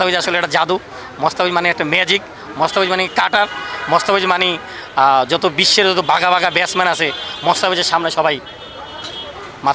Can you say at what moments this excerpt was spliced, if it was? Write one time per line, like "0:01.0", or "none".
none